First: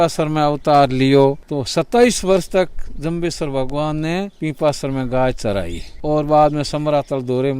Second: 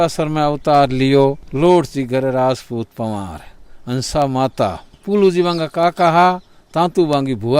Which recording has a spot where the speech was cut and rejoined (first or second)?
first